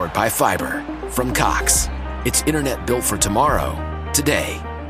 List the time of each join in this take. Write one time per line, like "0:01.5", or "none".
none